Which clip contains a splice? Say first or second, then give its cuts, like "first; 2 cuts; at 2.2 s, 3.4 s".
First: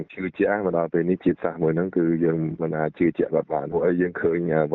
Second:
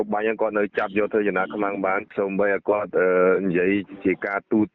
second; 1 cut; at 2.1 s